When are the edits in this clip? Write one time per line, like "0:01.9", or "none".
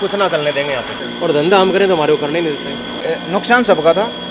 0:00.9
0:03.0